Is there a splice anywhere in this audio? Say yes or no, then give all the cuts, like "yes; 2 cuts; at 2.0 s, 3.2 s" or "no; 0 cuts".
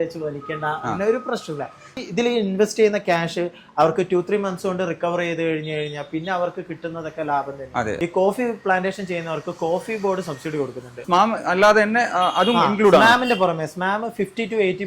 yes; 3 cuts; at 2.0 s, 8.0 s, 11.0 s